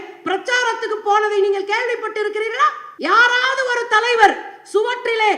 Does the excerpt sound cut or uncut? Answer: cut